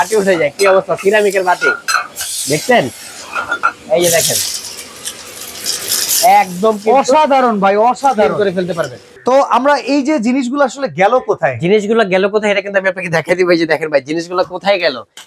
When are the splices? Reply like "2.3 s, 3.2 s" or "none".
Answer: none

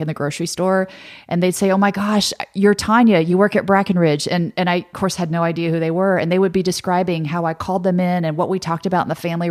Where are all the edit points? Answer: none

